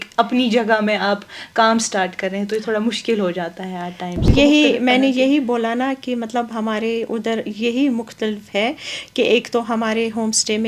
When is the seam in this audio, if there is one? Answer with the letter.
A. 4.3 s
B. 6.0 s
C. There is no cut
A